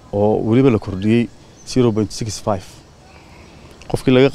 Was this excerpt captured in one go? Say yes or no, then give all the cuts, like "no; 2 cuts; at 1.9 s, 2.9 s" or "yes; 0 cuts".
yes; 0 cuts